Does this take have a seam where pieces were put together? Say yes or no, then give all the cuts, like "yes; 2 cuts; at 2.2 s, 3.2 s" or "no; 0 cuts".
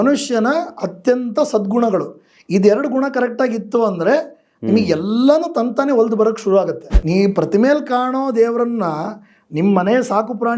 yes; 1 cut; at 6.9 s